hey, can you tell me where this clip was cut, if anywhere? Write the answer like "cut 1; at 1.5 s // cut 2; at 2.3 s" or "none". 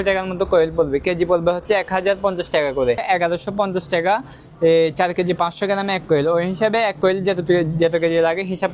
cut 1; at 3.0 s